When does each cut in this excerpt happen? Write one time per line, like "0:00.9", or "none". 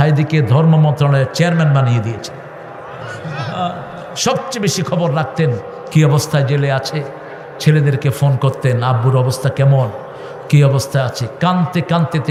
none